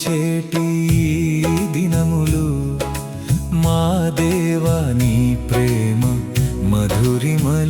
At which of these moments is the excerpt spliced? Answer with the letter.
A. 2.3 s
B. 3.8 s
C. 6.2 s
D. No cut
D